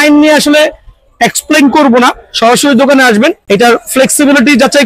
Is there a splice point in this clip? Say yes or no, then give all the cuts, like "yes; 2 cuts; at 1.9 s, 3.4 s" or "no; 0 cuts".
no; 0 cuts